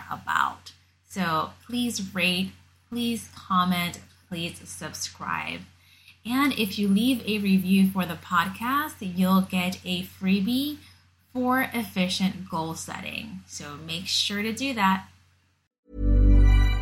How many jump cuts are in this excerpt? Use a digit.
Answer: 1